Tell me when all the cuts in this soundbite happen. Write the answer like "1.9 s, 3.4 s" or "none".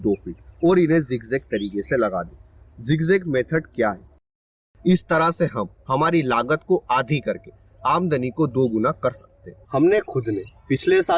4.4 s